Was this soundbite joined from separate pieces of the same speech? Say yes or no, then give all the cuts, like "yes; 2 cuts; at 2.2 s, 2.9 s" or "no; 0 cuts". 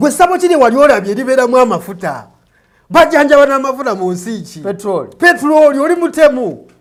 no; 0 cuts